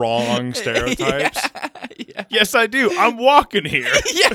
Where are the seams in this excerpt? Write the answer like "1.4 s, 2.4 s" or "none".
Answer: 2.1 s